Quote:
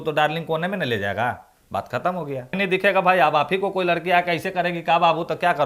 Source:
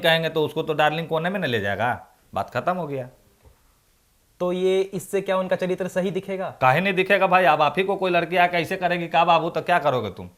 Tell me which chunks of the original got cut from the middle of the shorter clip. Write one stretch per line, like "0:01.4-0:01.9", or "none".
0:03.2-0:06.8

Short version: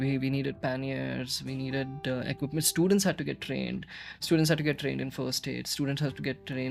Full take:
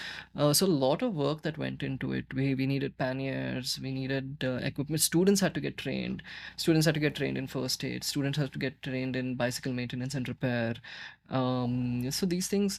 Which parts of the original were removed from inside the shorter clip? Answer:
none

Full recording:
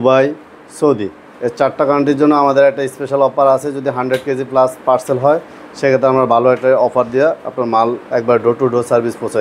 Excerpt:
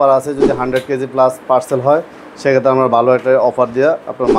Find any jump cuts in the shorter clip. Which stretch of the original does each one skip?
none

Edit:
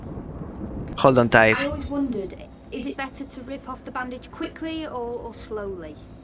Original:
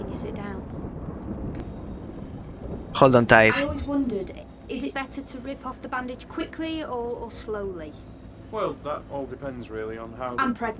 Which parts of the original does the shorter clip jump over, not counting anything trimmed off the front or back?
0:01.6-0:02.9

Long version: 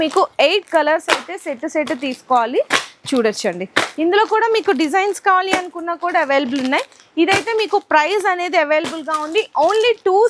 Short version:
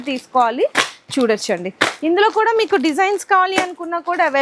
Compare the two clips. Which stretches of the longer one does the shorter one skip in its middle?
none

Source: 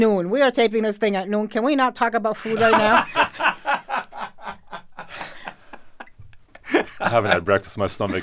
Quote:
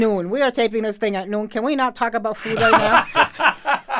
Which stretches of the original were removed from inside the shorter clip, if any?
none

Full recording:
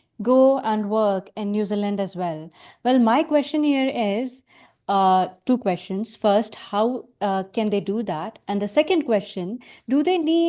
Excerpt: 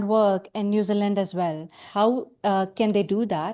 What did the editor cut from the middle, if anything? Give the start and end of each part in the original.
0:02.6-0:06.6

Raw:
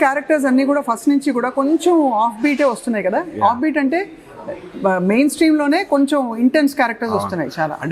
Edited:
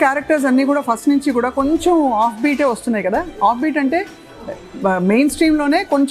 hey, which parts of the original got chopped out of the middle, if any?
none

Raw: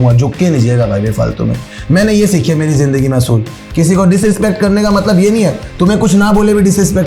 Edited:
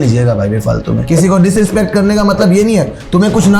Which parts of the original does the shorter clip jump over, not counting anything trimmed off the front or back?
0:01.5-0:03.7

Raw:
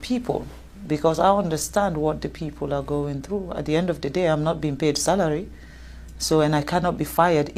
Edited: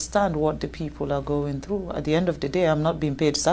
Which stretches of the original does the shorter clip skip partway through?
none

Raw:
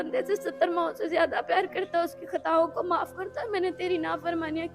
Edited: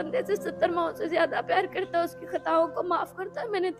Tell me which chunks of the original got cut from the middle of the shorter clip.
none

